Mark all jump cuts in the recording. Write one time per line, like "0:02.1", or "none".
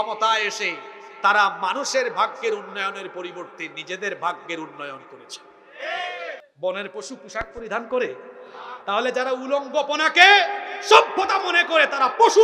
0:06.4